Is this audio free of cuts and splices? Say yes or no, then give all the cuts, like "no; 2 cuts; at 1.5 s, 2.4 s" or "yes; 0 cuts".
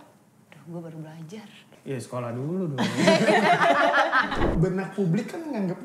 no; 2 cuts; at 1.7 s, 4.5 s